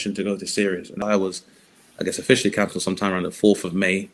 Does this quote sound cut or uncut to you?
cut